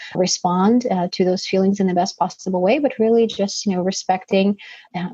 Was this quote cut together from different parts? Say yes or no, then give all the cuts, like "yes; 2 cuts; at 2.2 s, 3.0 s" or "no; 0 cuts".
no; 0 cuts